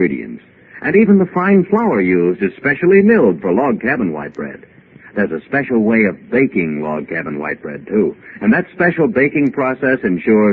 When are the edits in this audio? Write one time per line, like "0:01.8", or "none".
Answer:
none